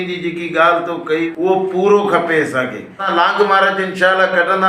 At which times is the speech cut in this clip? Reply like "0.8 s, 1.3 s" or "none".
1.3 s, 3.0 s